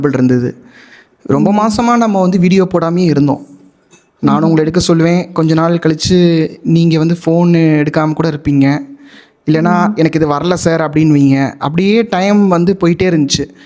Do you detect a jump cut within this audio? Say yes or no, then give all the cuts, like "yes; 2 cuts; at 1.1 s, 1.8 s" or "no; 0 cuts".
no; 0 cuts